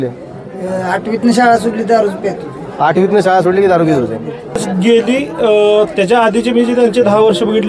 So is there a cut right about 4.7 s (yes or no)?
yes